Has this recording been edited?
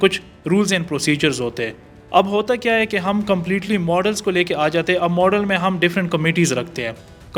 no; 0 cuts

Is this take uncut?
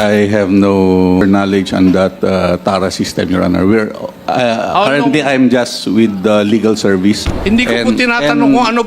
no; 2 cuts; at 1.2 s, 7.3 s

